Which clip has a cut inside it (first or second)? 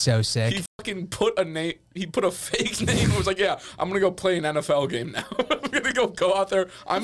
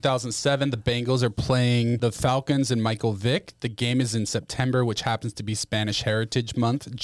second